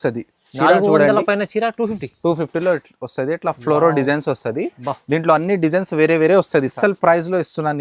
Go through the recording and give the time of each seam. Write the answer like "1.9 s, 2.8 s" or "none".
6.7 s